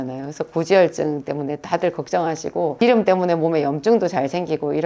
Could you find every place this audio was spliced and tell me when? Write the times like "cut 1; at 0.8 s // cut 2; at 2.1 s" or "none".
cut 1; at 2.8 s

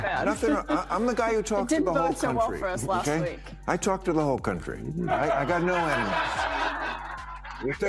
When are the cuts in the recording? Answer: none

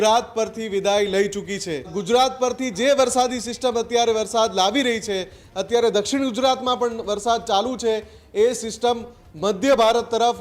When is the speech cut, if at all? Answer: cut 1; at 1.9 s

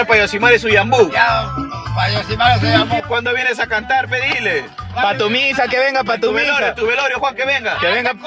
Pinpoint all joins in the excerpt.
none

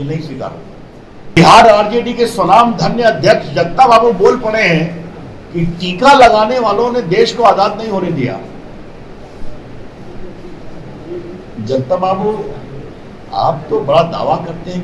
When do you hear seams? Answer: cut 1; at 1.4 s

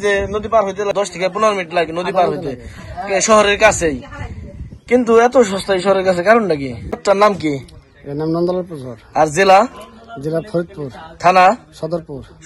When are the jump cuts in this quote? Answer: cut 1; at 0.9 s // cut 2; at 7.0 s

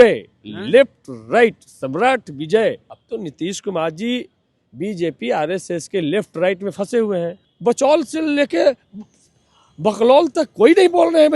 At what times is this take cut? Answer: cut 1; at 2.9 s // cut 2; at 7.4 s

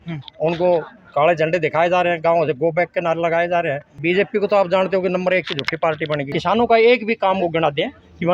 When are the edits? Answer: cut 1; at 3.9 s // cut 2; at 6.3 s

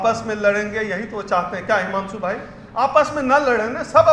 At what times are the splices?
none

